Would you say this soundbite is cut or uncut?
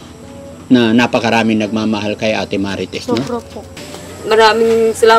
cut